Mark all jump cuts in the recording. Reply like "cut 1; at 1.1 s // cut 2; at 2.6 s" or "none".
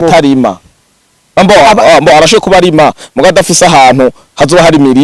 none